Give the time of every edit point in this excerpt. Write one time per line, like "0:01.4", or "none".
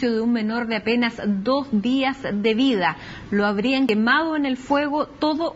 0:03.0